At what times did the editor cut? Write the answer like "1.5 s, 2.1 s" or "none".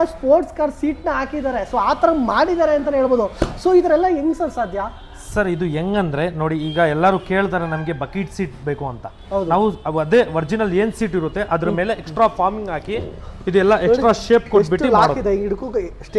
none